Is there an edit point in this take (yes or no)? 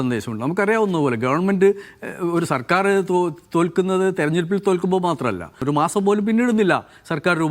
yes